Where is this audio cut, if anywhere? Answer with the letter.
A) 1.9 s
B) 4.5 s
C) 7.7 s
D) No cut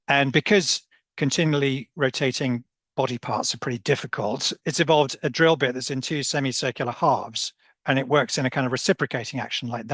B